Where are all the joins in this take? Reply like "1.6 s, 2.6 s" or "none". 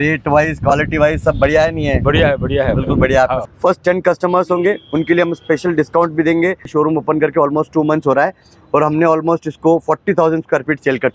3.4 s, 6.7 s